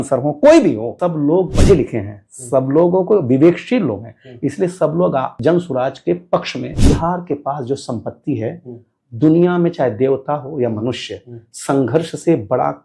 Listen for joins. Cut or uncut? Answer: cut